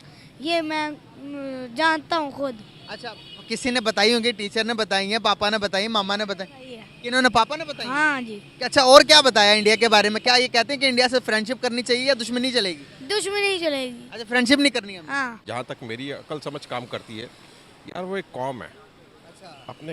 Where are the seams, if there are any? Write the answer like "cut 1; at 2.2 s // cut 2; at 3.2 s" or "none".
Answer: cut 1; at 14.9 s